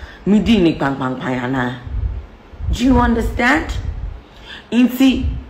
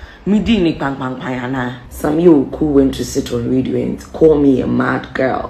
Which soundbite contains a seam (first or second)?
second